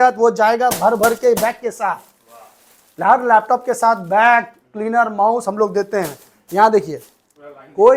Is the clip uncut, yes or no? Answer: yes